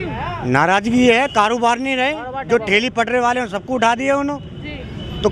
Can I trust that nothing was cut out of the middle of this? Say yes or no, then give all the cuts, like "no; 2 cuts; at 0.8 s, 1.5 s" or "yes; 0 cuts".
yes; 0 cuts